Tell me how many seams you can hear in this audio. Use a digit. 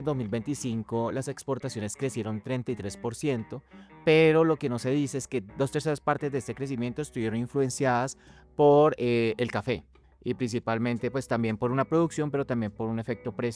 1